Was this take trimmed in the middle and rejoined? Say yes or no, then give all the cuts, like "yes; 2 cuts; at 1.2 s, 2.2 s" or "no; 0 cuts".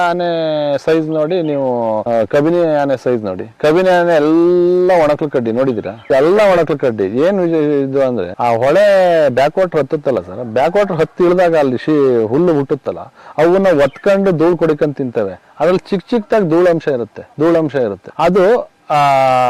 no; 0 cuts